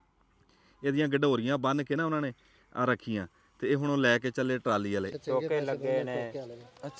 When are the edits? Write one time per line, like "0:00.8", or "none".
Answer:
0:05.1